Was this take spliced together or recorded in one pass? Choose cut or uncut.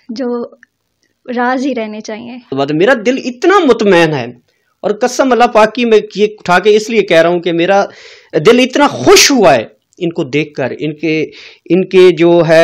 cut